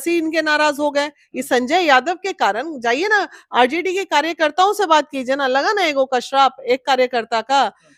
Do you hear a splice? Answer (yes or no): no